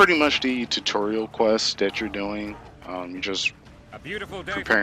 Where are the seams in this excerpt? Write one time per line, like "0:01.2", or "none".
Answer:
none